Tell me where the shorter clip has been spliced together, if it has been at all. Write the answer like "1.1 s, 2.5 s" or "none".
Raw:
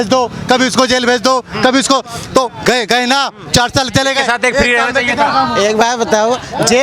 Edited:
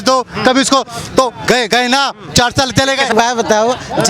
3.1 s